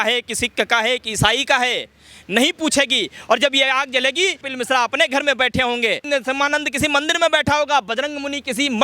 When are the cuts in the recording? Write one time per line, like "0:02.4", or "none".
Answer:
0:06.0